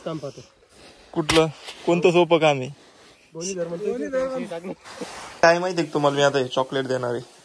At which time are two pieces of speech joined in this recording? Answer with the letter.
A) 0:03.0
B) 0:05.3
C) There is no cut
B